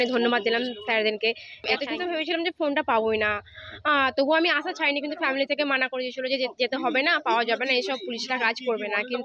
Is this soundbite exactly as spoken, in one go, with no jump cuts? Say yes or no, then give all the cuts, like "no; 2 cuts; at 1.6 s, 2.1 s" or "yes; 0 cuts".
no; 1 cut; at 1.7 s